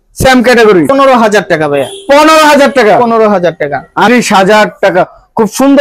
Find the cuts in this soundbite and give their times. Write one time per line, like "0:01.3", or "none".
0:00.9
0:04.1

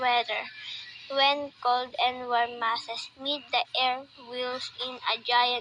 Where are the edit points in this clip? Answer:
0:00.9

